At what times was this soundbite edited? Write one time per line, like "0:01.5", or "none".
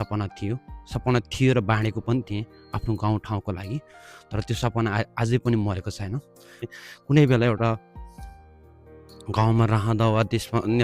0:06.7